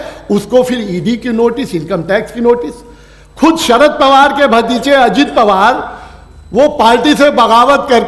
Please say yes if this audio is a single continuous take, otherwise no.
yes